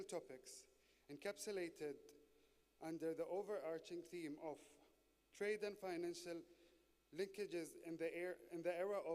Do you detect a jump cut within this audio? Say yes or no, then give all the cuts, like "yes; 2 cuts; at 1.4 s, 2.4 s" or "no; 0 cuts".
yes; 1 cut; at 7.8 s